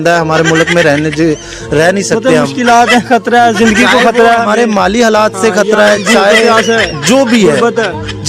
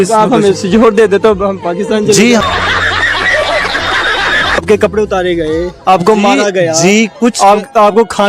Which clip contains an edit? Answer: second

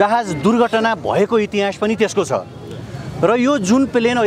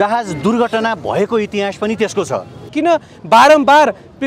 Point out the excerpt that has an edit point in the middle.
second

